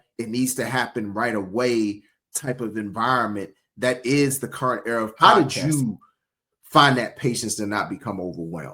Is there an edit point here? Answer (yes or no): yes